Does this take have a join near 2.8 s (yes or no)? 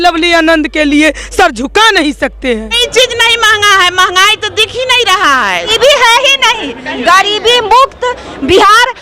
yes